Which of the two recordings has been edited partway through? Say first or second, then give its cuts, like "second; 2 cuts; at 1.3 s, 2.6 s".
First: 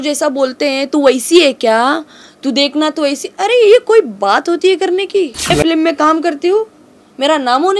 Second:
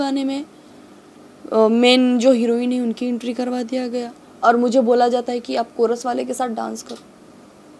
first; 1 cut; at 5.5 s